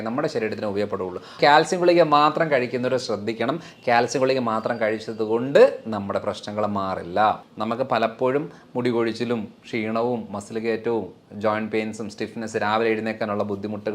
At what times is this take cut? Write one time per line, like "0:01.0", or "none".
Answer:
0:01.4
0:07.5

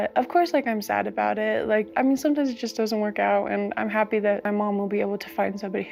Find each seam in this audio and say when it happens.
none

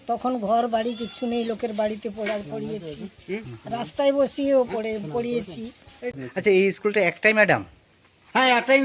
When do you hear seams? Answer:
0:06.2

